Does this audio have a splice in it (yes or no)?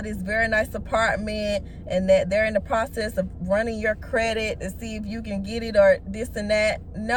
no